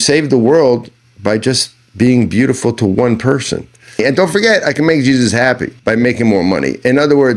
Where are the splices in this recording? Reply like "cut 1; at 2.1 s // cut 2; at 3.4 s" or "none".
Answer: cut 1; at 4.0 s // cut 2; at 5.7 s